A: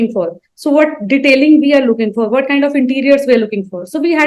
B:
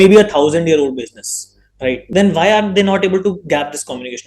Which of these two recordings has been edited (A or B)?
B